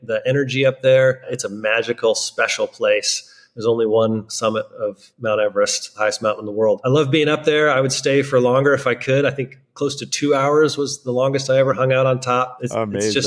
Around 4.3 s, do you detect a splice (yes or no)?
yes